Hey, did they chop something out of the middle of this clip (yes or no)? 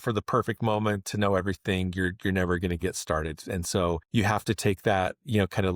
no